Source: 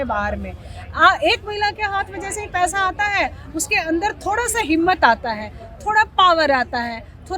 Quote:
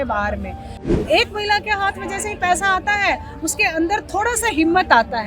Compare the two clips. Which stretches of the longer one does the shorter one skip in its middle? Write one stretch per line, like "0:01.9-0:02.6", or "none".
0:01.0-0:01.1